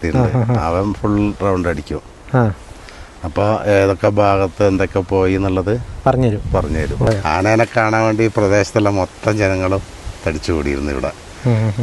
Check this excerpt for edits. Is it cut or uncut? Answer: cut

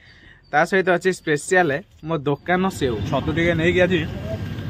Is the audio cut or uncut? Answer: cut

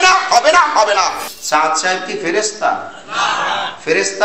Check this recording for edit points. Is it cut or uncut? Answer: cut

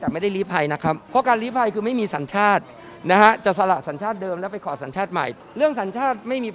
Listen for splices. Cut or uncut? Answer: cut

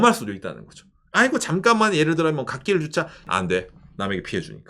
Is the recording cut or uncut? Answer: cut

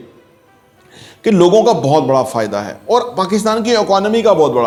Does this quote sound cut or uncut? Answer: uncut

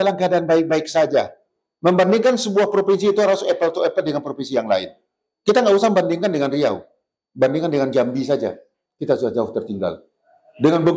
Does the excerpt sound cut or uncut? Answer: uncut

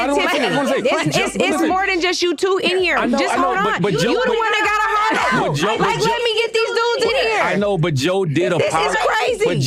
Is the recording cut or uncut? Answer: uncut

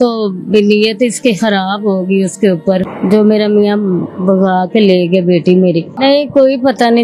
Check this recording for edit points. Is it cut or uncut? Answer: cut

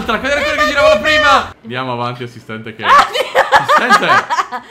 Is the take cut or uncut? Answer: cut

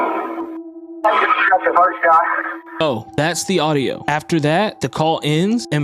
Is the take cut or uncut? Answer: cut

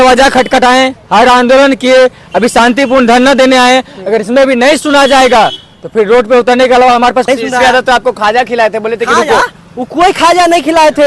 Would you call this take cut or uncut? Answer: cut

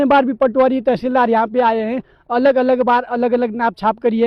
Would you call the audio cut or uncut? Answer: uncut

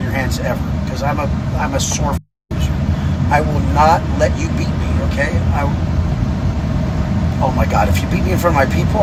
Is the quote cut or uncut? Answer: uncut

